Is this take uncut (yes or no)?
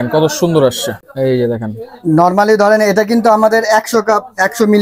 no